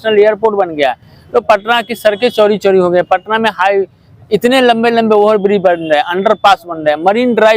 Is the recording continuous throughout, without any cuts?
yes; 0 cuts

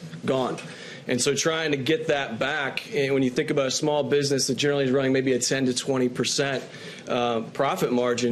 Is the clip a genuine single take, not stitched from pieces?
yes; 0 cuts

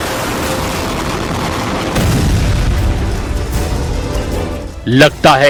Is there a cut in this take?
no; 0 cuts

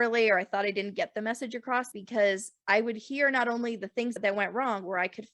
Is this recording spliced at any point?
yes; 2 cuts; at 1.9 s, 4.2 s

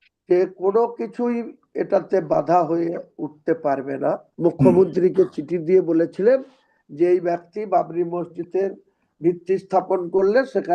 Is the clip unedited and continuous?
no; 1 cut; at 4.3 s

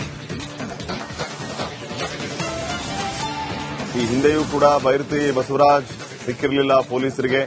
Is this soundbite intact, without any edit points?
no; 1 cut; at 0.9 s

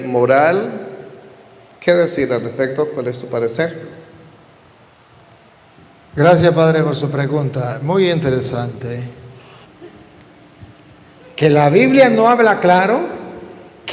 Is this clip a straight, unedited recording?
no; 1 cut; at 9.7 s

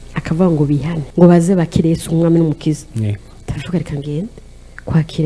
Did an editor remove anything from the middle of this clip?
yes; 1 cut; at 1.0 s

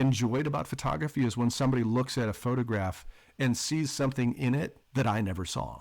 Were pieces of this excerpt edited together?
yes; 1 cut; at 4.8 s

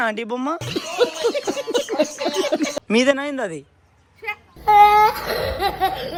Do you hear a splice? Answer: no; 0 cuts

